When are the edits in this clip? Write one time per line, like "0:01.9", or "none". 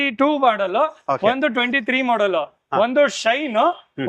none

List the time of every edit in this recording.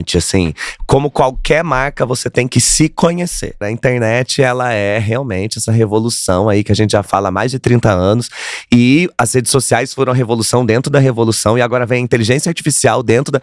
0:03.7

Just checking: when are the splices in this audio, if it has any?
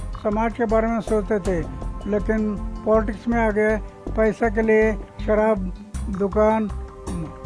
none

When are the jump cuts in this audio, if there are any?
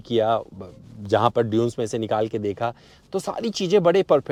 none

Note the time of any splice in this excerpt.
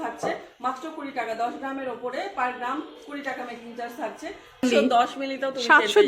0:04.6

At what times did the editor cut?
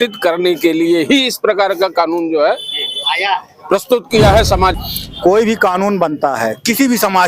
0:04.7

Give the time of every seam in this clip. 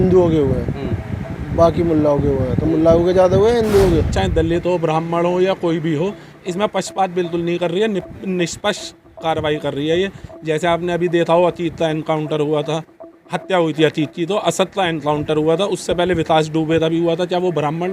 0:04.1

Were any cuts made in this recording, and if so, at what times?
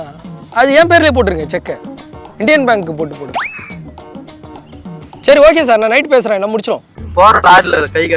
0:06.9

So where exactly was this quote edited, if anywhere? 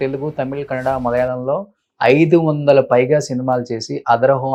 none

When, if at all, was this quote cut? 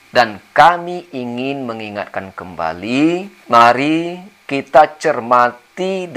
0:03.3

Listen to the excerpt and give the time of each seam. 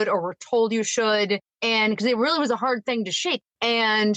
0:01.5
0:03.4

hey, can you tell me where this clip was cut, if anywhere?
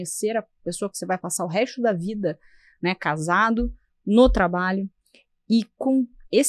none

